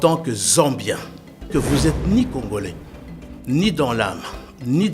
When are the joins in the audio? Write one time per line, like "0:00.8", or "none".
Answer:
0:01.5